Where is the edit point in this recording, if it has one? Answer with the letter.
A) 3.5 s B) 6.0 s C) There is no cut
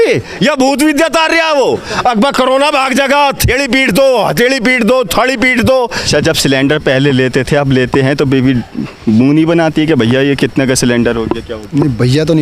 B